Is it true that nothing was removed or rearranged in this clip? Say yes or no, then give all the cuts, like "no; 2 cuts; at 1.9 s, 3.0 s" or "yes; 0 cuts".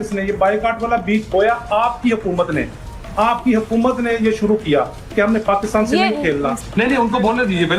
no; 1 cut; at 6.6 s